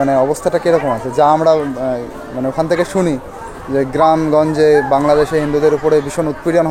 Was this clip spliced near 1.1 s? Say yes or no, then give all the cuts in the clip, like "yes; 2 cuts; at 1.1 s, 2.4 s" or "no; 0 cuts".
no; 0 cuts